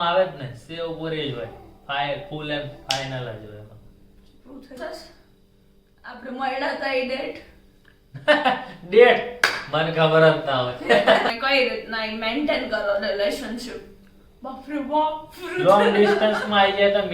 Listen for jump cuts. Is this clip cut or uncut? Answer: cut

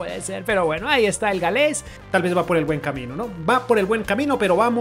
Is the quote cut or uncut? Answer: cut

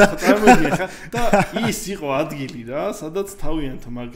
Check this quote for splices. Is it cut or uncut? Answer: uncut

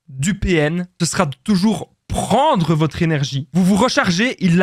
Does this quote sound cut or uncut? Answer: cut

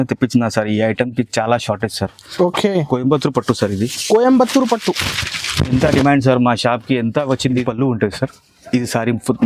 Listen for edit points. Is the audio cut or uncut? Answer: cut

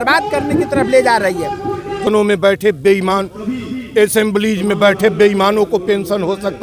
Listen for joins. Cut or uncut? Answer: cut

